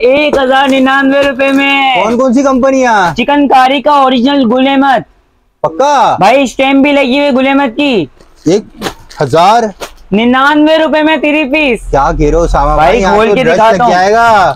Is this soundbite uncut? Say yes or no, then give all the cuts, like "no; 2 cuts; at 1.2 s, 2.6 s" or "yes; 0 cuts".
yes; 0 cuts